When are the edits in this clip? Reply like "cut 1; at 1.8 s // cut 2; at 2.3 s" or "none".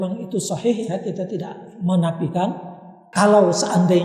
cut 1; at 3.1 s